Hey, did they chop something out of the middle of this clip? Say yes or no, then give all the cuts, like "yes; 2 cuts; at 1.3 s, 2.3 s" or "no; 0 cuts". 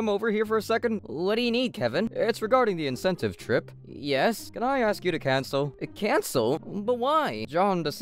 no; 0 cuts